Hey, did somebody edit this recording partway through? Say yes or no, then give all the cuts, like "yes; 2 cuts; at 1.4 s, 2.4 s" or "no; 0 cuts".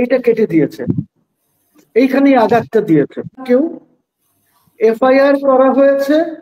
yes; 1 cut; at 3.4 s